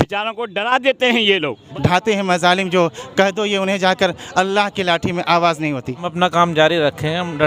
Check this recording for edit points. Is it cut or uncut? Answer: cut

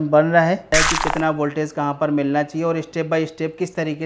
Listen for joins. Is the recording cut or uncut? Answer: cut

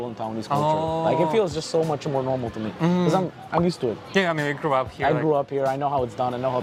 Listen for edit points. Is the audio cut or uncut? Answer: uncut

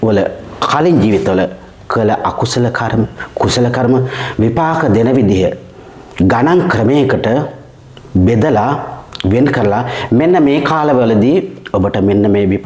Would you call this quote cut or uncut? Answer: uncut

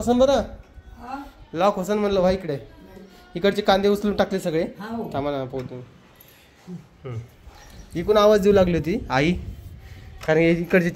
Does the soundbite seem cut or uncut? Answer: uncut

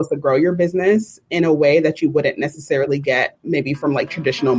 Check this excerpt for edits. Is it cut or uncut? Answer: uncut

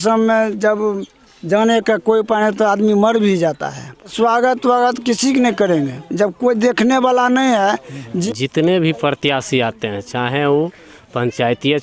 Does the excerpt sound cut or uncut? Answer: cut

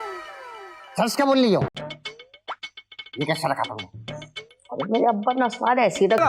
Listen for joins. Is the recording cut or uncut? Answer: cut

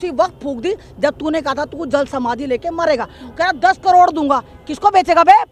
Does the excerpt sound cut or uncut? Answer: uncut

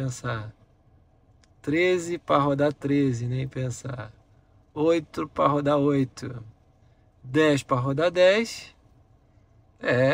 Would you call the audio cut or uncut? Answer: uncut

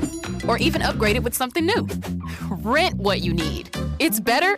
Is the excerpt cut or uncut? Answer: uncut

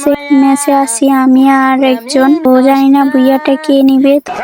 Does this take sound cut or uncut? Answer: cut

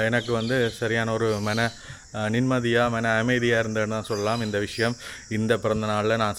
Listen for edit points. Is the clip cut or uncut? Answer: uncut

